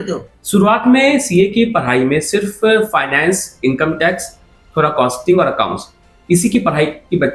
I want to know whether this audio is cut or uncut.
uncut